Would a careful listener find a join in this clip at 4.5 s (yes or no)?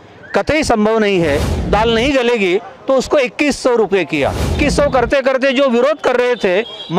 yes